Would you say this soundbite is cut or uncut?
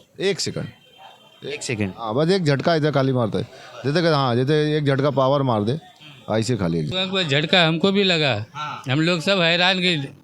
cut